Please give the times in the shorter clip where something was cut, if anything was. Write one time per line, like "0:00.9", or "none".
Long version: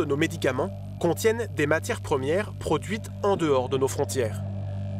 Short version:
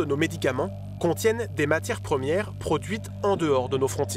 none